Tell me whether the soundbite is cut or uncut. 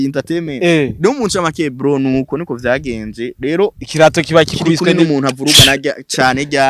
uncut